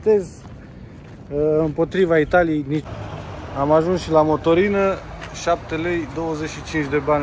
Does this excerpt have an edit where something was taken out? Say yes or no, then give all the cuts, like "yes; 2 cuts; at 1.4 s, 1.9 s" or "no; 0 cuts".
yes; 1 cut; at 3.0 s